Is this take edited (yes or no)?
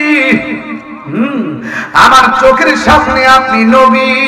no